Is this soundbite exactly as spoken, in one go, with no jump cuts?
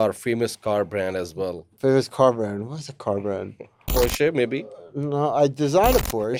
yes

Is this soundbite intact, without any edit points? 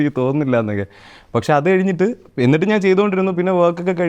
yes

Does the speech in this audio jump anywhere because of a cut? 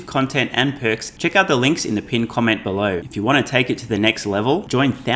yes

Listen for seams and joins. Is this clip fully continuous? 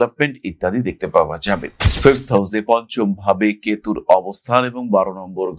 no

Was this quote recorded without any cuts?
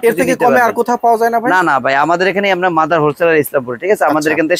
yes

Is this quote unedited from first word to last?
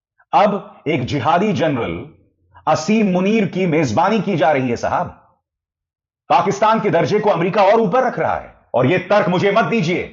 no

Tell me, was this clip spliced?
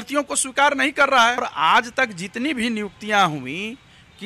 yes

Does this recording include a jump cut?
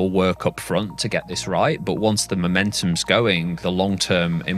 yes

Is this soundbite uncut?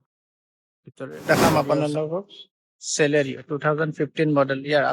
no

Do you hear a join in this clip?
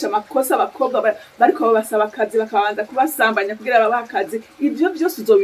no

